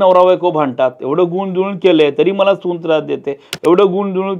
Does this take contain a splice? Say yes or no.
no